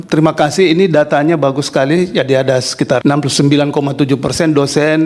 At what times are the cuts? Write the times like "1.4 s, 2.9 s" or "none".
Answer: 3.0 s